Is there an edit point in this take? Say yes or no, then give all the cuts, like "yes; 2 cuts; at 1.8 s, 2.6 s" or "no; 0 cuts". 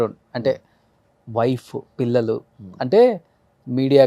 no; 0 cuts